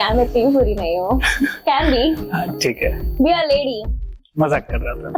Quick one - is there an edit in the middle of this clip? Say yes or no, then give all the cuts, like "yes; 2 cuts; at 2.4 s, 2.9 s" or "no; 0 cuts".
no; 0 cuts